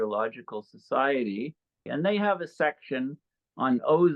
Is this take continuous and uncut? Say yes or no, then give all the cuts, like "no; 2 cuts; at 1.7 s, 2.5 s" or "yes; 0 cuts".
no; 1 cut; at 1.9 s